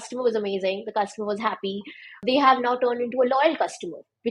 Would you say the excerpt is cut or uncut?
cut